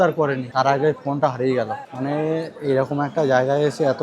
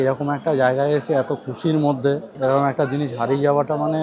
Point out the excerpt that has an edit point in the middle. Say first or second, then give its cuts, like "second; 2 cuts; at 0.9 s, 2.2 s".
first; 1 cut; at 1.8 s